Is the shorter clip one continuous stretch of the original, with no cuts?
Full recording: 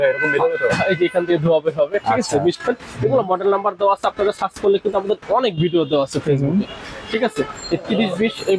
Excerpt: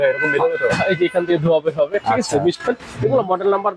yes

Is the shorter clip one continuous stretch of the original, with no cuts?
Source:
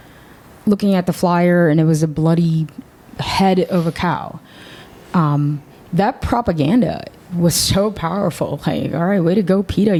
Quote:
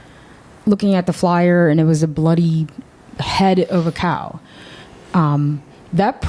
yes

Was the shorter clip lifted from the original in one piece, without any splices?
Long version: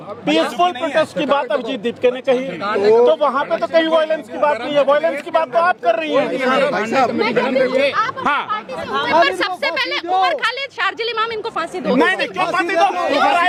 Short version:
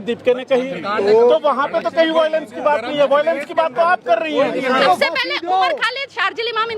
no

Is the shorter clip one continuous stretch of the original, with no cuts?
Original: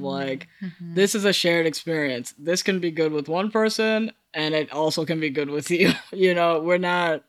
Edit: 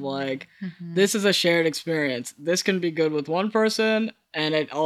yes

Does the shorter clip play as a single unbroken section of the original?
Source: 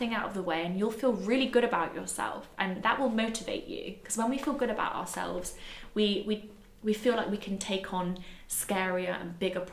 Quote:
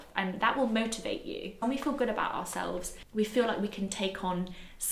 no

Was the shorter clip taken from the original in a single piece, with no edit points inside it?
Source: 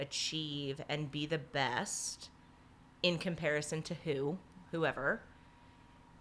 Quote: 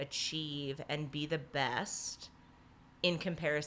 yes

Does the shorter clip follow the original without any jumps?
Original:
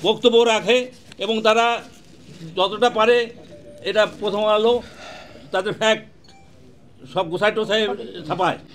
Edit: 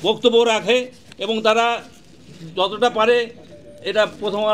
yes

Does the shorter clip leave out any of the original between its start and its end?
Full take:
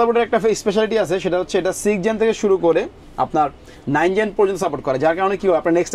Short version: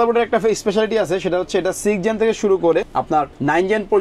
yes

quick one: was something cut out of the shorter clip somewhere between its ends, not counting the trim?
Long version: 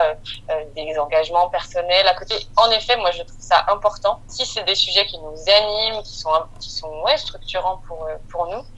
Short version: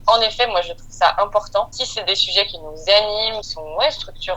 yes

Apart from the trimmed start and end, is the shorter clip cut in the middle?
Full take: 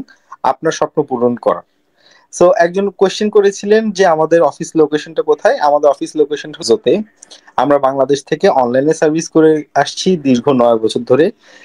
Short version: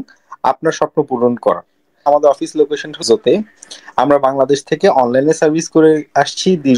yes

